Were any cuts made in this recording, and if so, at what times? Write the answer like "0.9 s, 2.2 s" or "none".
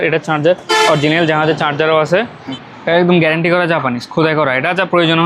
2.4 s